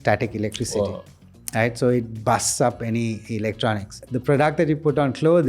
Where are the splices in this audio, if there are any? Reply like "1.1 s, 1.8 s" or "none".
3.9 s